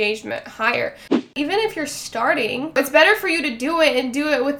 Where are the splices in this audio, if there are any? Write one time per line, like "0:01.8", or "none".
0:01.2
0:02.7